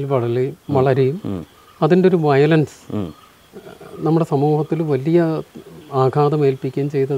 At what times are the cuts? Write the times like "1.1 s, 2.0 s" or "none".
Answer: none